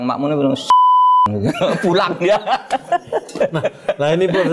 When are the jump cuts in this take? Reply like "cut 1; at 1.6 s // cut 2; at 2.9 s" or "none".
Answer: none